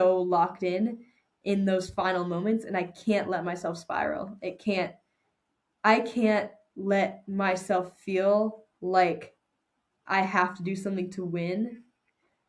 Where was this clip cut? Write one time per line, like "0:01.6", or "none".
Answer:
none